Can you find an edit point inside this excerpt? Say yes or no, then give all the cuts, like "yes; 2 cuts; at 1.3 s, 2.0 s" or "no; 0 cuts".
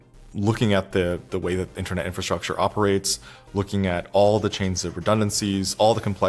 no; 0 cuts